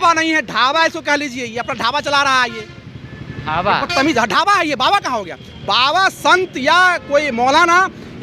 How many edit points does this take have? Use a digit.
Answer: 0